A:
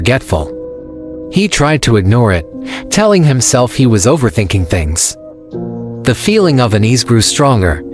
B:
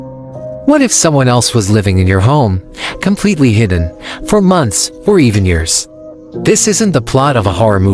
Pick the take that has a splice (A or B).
B